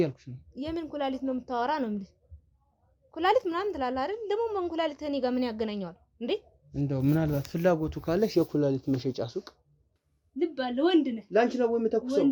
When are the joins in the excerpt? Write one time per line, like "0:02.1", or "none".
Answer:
0:10.0